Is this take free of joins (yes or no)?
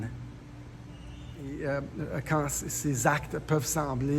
no